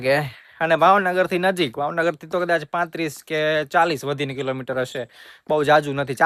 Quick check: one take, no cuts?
yes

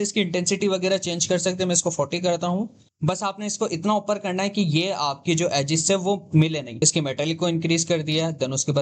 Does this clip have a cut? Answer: yes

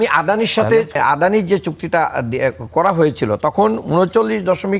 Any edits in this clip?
yes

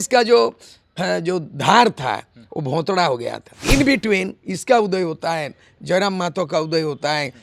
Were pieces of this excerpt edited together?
yes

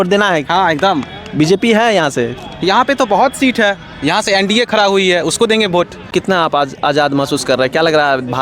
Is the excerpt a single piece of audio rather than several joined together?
no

